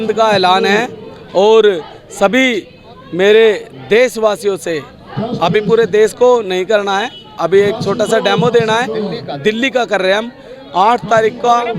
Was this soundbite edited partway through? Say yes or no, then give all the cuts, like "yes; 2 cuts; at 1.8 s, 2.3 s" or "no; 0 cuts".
no; 0 cuts